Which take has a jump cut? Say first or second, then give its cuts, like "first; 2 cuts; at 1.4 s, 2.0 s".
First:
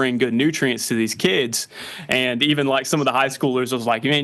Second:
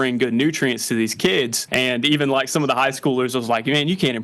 second; 1 cut; at 1.6 s